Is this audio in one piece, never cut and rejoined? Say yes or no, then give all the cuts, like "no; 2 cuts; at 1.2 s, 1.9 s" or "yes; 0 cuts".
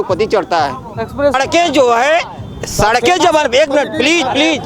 no; 1 cut; at 1.3 s